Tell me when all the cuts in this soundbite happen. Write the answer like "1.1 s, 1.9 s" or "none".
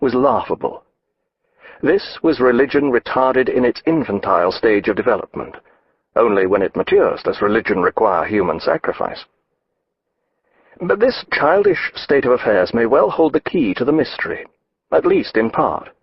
10.9 s